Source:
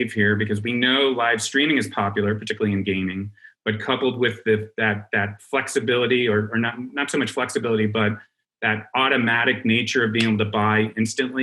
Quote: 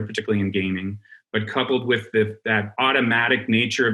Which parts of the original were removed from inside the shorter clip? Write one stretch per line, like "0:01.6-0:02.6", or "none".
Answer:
0:05.0-0:08.9